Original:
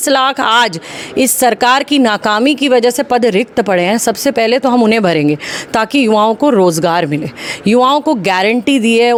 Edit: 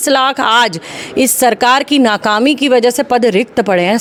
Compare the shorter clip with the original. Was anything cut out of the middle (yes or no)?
no